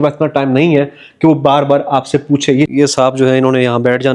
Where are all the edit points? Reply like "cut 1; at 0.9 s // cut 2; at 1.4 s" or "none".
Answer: cut 1; at 2.7 s

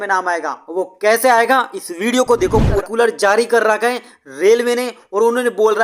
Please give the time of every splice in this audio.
cut 1; at 2.8 s

